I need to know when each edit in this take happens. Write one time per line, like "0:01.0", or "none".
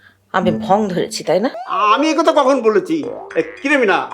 0:01.6